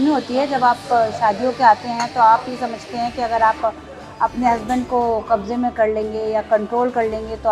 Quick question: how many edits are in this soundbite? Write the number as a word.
zero